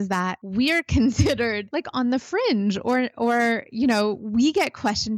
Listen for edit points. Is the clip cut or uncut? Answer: uncut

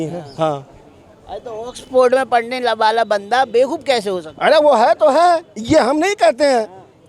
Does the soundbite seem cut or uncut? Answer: uncut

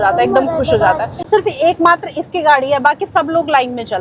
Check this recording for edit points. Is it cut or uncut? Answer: cut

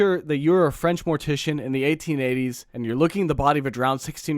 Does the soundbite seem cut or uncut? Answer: cut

